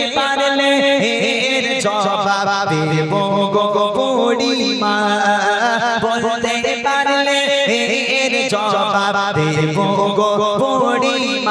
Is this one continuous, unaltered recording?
yes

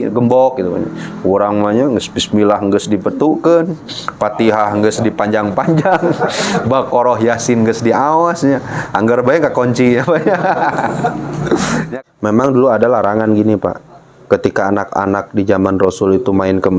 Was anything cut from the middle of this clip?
yes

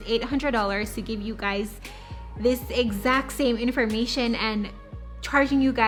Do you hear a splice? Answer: no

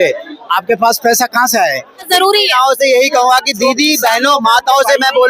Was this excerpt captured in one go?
no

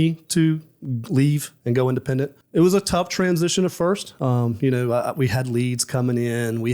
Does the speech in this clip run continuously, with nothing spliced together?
no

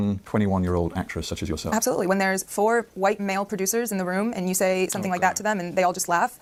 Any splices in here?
no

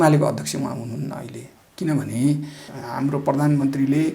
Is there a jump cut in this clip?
yes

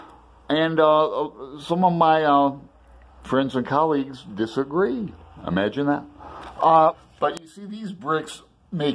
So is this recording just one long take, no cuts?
no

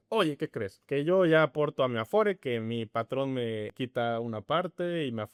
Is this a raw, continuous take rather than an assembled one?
yes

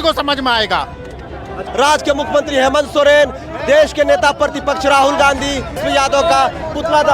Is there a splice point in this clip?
yes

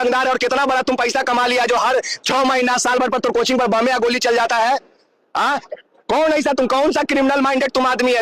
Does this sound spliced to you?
no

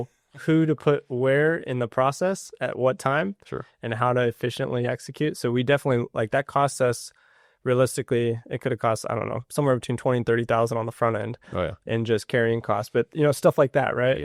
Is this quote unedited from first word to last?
yes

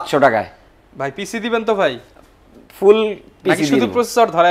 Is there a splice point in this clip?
no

